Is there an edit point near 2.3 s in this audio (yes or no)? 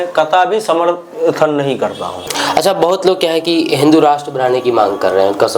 yes